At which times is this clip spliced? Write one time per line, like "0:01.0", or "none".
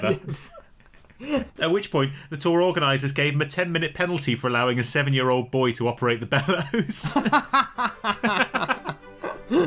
0:01.5